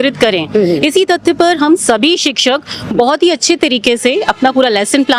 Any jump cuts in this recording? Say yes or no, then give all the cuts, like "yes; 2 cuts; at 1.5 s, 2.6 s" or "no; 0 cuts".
no; 0 cuts